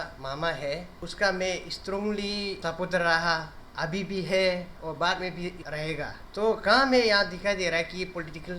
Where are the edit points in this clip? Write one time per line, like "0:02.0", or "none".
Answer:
0:01.0
0:02.6
0:04.7
0:05.7